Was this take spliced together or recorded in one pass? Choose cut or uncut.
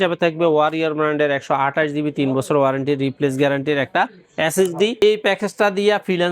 cut